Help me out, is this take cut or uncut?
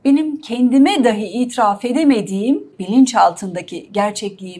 cut